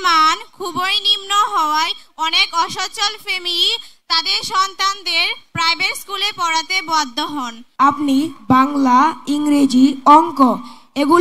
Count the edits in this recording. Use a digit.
1